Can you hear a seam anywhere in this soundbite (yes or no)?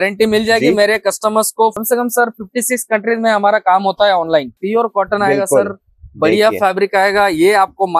yes